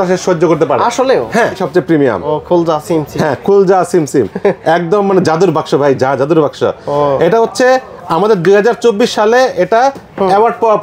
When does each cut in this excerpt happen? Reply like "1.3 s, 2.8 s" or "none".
1.7 s